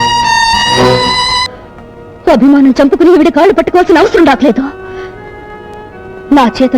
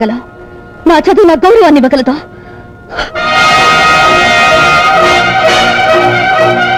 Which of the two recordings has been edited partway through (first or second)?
first